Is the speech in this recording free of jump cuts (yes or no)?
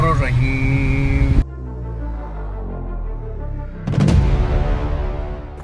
yes